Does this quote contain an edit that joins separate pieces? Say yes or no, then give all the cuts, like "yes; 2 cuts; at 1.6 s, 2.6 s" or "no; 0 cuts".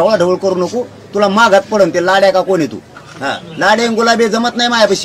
no; 0 cuts